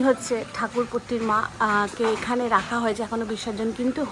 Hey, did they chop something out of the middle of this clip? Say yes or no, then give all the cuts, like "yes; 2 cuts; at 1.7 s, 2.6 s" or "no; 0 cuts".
no; 0 cuts